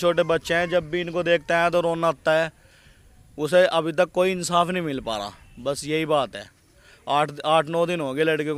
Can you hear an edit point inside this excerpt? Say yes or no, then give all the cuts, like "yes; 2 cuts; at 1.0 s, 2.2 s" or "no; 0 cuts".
no; 0 cuts